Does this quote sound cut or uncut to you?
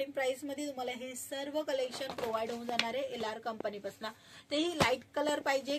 uncut